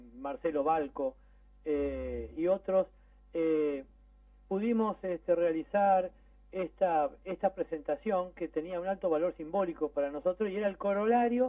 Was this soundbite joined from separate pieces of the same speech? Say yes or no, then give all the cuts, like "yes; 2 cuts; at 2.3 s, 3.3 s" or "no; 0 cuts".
no; 0 cuts